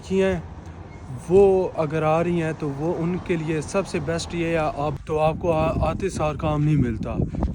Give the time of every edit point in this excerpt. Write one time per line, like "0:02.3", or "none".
0:05.0